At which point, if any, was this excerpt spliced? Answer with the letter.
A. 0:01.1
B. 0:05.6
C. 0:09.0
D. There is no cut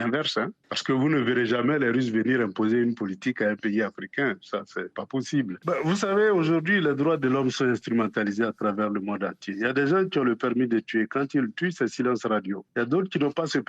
B